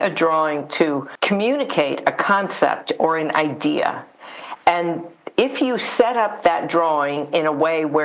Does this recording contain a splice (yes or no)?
yes